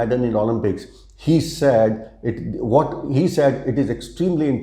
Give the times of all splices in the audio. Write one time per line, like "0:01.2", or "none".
none